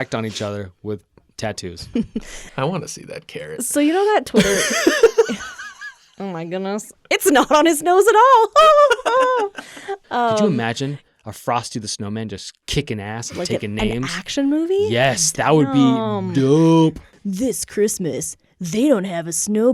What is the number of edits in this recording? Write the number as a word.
two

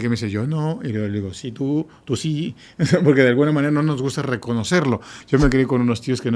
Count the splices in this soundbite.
one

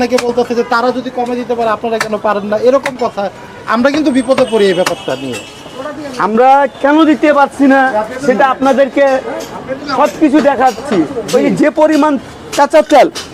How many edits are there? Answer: zero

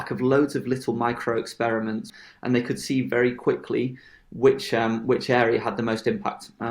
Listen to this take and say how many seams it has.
one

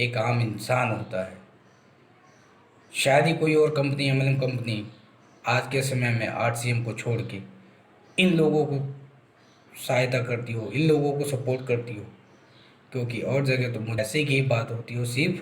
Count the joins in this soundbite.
one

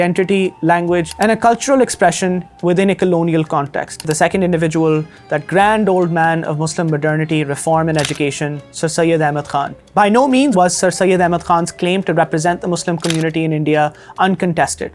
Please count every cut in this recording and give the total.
three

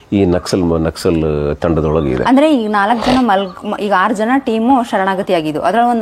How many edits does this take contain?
zero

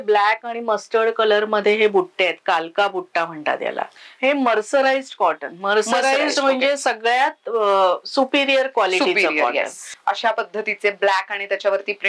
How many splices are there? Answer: two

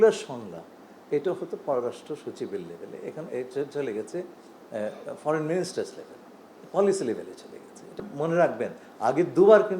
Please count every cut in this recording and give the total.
one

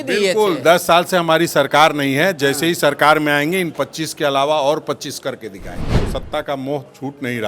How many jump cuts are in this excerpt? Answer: one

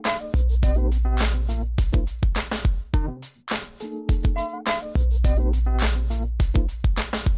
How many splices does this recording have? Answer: zero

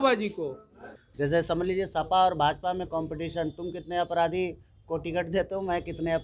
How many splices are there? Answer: one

